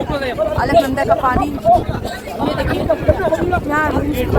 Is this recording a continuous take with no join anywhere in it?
yes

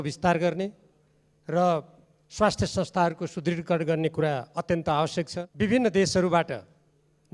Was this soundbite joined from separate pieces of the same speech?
yes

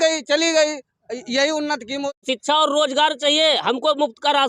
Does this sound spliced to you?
yes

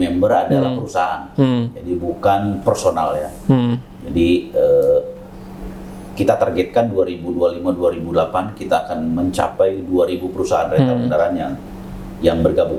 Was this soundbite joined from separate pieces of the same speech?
no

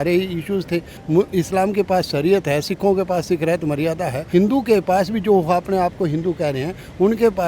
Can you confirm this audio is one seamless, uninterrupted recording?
no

